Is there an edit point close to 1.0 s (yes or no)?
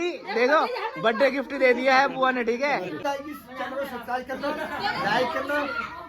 no